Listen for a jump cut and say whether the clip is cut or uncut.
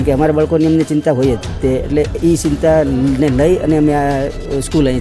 uncut